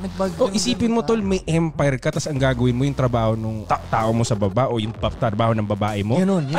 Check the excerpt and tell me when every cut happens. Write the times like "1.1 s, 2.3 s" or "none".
none